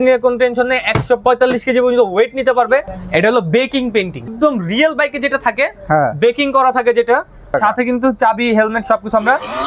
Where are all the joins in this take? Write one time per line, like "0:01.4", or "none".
0:01.2
0:03.0
0:04.3
0:07.6